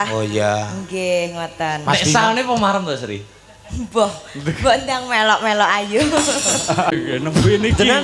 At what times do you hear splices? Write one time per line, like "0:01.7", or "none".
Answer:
0:07.0

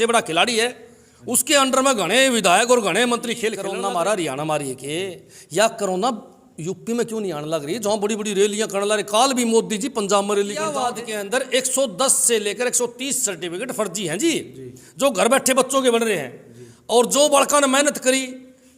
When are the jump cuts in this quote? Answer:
0:03.6
0:10.8

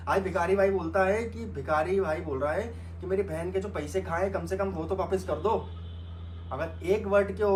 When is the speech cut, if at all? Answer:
none

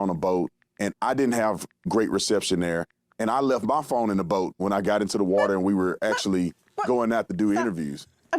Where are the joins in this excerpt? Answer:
none

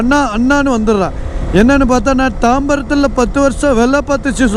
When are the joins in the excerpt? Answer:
none

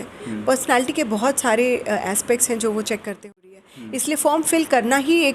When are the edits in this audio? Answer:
0:03.4

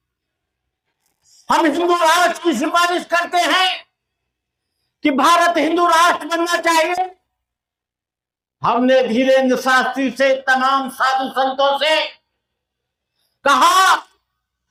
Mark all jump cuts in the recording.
none

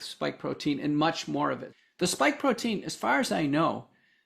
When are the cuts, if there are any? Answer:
0:01.7

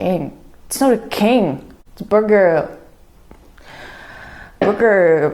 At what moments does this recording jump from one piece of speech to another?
none

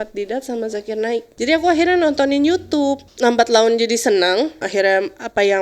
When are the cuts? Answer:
0:01.3
0:03.1
0:04.7

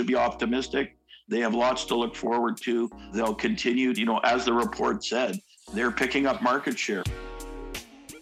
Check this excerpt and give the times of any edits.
0:07.0

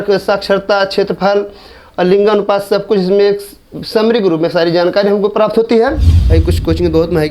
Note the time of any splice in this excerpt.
0:06.1

